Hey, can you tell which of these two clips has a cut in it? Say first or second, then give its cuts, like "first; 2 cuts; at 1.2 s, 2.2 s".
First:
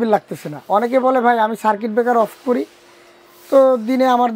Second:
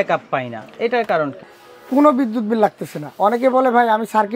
second; 1 cut; at 1.4 s